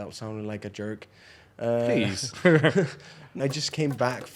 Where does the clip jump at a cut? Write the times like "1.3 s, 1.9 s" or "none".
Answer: 3.4 s